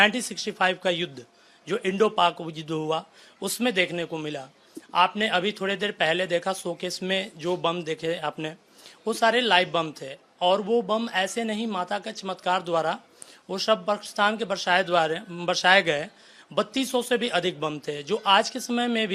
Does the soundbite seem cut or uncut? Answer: uncut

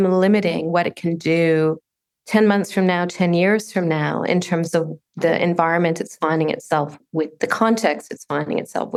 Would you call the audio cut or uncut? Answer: uncut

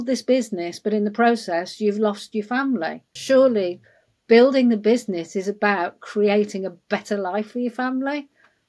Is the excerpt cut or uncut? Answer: cut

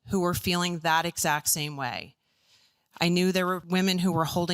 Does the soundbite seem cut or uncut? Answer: cut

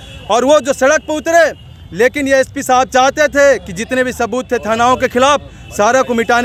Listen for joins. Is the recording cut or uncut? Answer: uncut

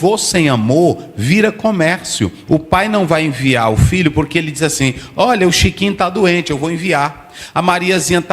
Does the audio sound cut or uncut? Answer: cut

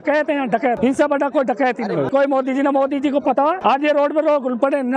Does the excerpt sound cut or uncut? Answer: cut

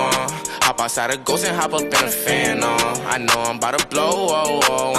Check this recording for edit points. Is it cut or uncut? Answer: cut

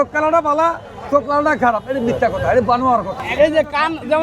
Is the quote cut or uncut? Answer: cut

